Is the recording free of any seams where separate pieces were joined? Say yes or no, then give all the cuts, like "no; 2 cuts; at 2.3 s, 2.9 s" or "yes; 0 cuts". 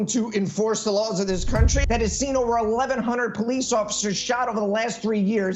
no; 1 cut; at 1.8 s